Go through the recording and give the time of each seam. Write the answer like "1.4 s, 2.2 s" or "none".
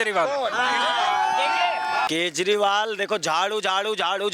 2.1 s

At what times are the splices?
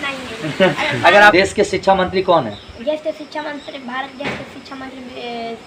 1.3 s

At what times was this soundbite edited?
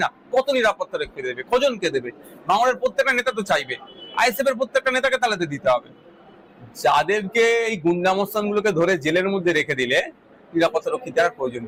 none

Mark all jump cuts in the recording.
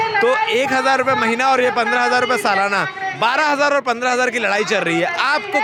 none

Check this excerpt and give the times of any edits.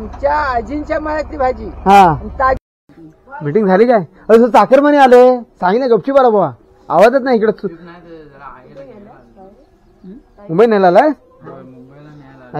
2.7 s

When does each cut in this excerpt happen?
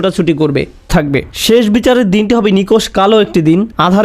0.9 s

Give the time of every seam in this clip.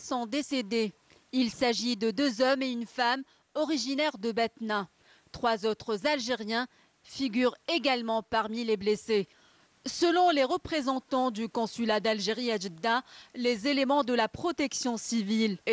4.7 s

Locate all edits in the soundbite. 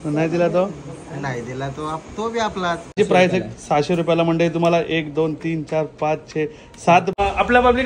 3.0 s, 7.2 s

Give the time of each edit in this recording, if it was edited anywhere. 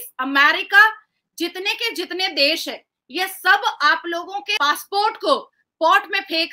4.5 s

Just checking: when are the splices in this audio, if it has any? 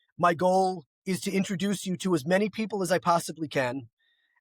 0.9 s

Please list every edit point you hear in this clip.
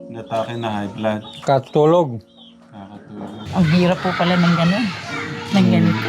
3.3 s

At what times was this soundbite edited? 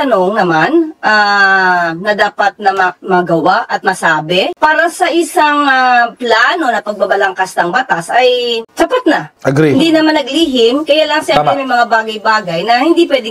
none

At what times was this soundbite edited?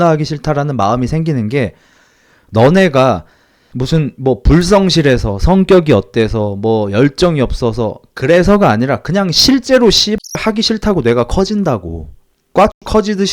none

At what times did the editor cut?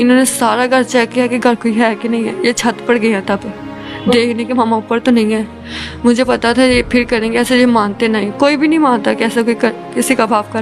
none

